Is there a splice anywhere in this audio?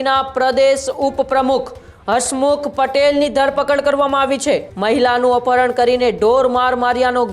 yes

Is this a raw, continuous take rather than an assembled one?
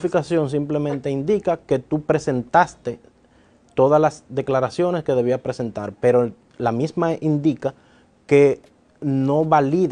yes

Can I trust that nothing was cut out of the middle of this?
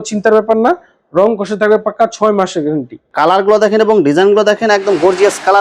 yes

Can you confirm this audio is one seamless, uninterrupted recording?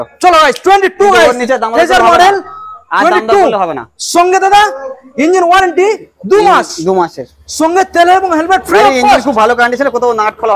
yes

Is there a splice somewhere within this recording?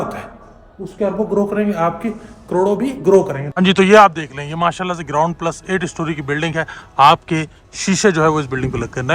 yes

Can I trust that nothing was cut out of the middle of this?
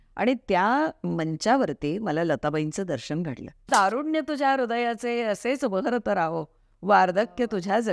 no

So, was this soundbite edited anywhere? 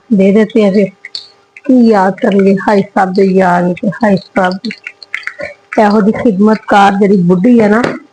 no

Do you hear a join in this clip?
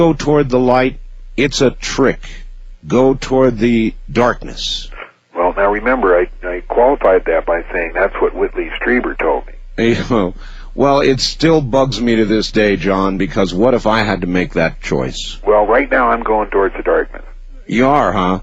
no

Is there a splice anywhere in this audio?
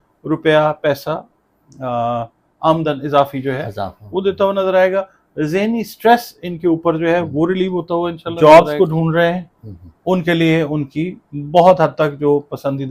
yes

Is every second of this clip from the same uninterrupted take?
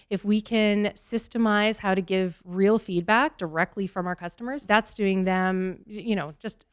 no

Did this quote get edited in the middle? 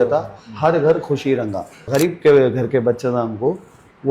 yes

